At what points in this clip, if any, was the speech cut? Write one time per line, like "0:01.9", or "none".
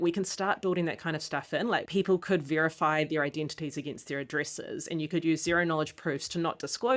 0:01.8

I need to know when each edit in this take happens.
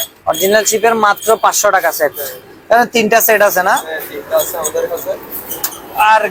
none

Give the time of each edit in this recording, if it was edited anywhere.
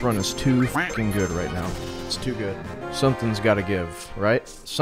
none

